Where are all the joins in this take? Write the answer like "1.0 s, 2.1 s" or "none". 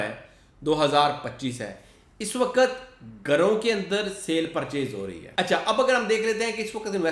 5.2 s